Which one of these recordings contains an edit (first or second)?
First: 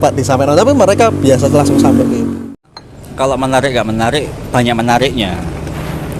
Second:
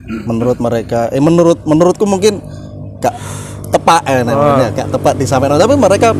first